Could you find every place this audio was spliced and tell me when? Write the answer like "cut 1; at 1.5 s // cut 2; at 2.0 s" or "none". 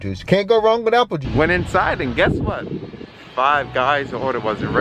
cut 1; at 1.2 s